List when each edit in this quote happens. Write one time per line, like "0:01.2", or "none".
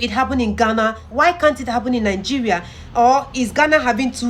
0:01.0